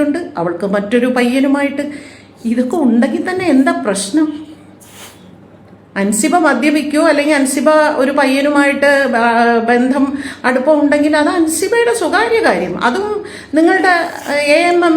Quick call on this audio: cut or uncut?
cut